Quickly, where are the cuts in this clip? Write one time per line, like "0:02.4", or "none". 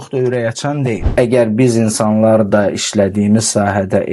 0:01.1